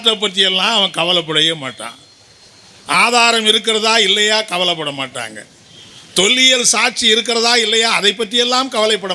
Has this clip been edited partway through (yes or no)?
no